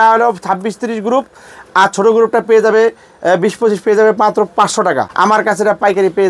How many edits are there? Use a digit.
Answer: 1